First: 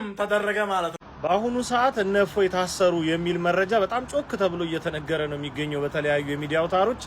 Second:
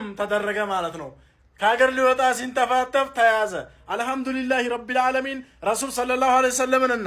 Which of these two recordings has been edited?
first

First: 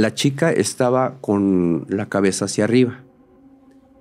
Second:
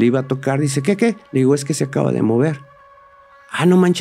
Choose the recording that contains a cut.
first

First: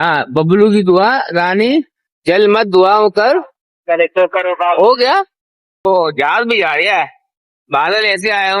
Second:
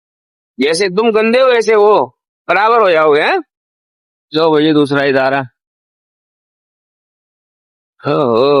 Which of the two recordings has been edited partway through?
first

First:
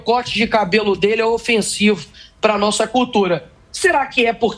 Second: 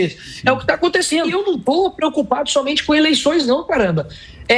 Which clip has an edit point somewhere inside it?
second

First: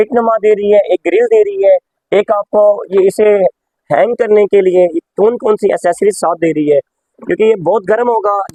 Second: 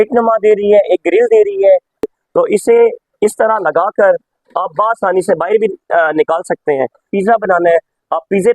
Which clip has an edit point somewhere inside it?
second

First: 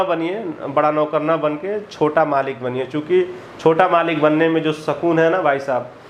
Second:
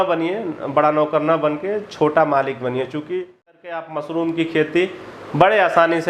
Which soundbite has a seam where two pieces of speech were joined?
second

